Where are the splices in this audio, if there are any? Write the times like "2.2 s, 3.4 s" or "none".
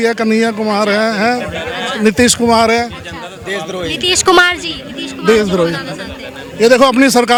none